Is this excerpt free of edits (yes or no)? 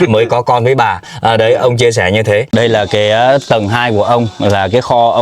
no